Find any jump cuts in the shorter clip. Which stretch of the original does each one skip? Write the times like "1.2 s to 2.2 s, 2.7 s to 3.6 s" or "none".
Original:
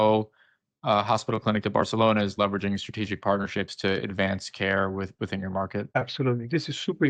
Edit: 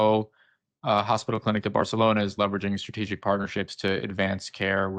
none